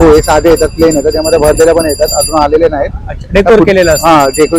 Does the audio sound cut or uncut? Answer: uncut